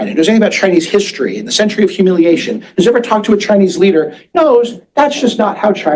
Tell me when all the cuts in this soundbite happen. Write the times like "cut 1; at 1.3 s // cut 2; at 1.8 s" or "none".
none